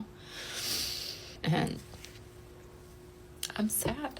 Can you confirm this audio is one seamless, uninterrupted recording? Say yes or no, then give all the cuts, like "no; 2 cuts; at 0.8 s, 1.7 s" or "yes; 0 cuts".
no; 1 cut; at 1.4 s